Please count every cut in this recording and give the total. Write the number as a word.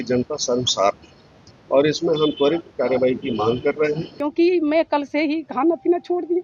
one